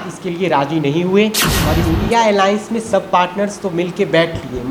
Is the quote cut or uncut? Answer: cut